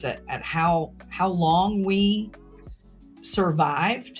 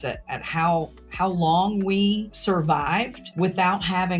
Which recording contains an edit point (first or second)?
second